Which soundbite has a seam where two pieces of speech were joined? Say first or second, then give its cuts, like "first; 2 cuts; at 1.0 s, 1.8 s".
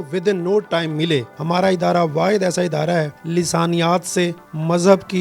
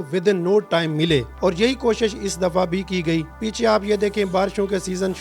first; 2 cuts; at 1.3 s, 3.2 s